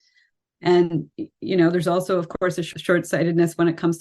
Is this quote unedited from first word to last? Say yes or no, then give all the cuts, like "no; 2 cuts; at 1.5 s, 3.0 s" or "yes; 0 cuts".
no; 1 cut; at 2.7 s